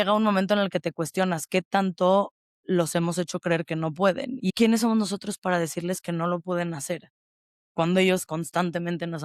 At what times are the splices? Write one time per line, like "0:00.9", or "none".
0:04.5

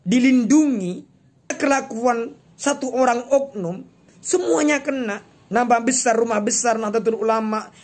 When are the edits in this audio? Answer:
0:01.6

